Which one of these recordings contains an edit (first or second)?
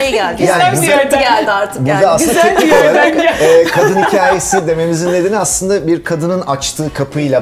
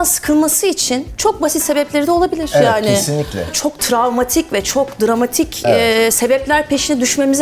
second